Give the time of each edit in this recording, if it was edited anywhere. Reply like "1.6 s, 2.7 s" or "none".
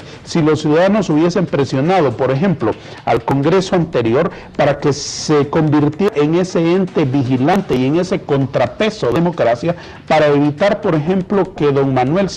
6.7 s